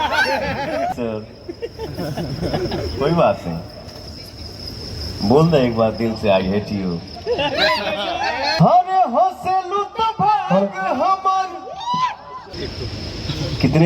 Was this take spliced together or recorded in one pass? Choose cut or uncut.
cut